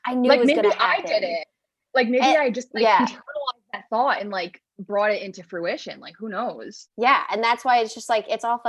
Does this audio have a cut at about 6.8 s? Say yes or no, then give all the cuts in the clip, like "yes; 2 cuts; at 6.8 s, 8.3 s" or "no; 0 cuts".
yes; 1 cut; at 6.8 s